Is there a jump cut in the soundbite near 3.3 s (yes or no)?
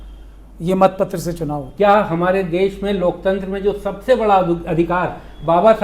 no